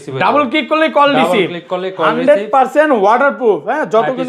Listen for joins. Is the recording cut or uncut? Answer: uncut